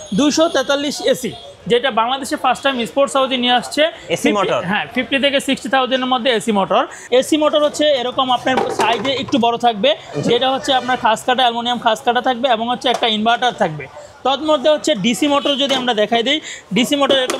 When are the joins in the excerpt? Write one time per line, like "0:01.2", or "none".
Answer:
0:07.0